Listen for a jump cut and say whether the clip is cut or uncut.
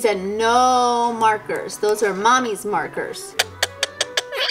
cut